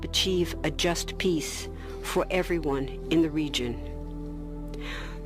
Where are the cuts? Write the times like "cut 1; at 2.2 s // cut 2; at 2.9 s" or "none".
cut 1; at 1.5 s